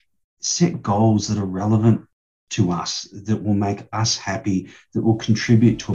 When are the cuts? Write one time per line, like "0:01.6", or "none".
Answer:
none